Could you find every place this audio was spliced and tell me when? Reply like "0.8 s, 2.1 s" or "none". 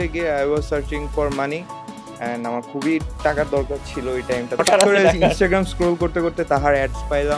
4.6 s